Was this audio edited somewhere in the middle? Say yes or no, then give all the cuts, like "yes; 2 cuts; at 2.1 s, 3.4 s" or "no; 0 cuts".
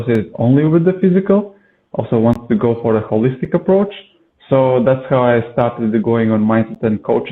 no; 0 cuts